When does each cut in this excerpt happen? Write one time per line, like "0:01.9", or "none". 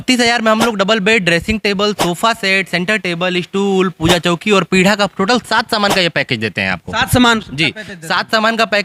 none